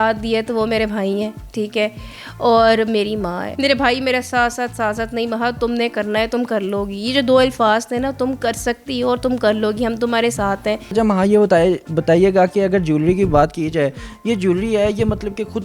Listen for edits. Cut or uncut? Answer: uncut